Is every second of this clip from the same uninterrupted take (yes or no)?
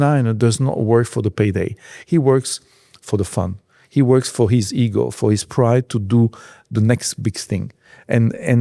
no